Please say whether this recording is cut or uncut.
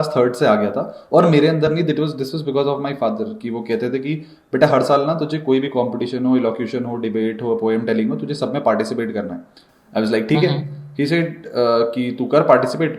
uncut